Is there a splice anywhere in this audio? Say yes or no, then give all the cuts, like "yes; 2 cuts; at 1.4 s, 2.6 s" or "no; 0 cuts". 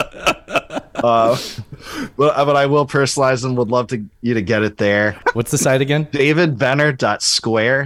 yes; 1 cut; at 5.2 s